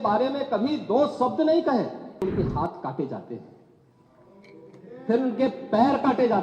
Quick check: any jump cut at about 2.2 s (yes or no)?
yes